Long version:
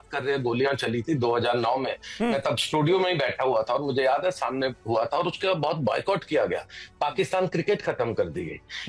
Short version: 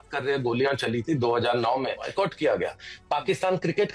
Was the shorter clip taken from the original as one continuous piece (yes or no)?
no